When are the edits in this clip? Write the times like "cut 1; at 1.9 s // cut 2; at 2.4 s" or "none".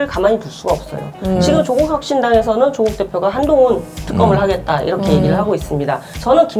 none